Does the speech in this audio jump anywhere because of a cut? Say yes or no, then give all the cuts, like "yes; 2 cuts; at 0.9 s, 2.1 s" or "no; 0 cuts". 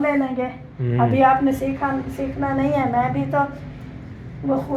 no; 0 cuts